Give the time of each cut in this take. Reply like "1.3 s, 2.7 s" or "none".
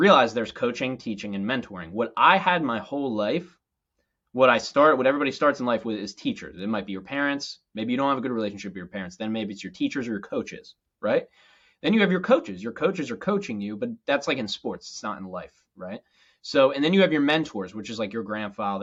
none